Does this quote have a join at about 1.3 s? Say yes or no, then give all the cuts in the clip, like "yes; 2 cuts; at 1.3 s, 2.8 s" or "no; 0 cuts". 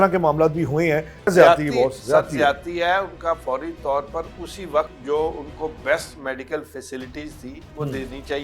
yes; 2 cuts; at 1.3 s, 5.0 s